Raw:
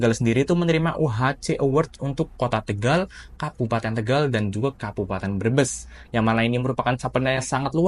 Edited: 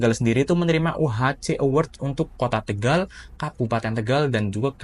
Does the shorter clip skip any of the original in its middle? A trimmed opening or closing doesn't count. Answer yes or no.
no